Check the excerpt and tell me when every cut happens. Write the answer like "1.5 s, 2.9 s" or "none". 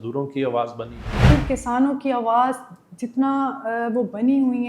1.3 s

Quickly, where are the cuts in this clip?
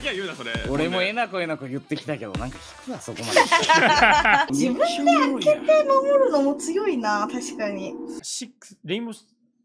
4.5 s, 8.2 s

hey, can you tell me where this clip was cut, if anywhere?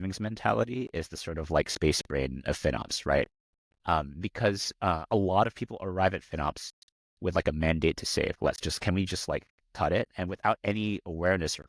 8.3 s

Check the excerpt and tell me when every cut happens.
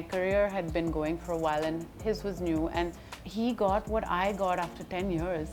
none

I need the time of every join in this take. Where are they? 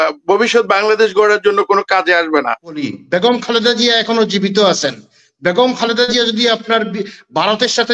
2.8 s

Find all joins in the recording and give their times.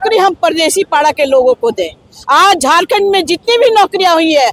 none

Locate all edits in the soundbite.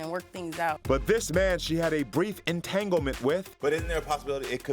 0.8 s, 3.5 s

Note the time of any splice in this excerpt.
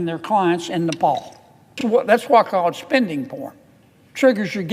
1.8 s

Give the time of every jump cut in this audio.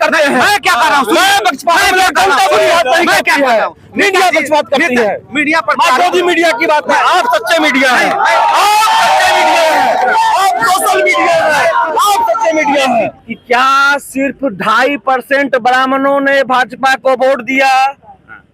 13.2 s

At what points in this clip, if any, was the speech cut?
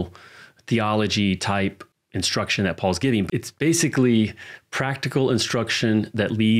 1.9 s, 3.3 s

